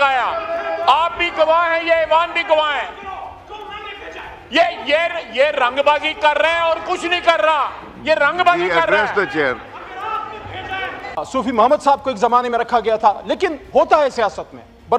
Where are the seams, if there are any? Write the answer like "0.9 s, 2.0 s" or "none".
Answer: 11.2 s